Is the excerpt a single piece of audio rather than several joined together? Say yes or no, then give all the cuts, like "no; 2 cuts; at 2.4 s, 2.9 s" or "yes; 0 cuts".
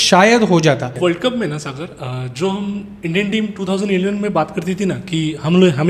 no; 1 cut; at 0.9 s